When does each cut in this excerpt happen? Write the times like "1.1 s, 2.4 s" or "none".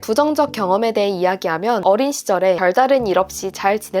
1.8 s, 2.6 s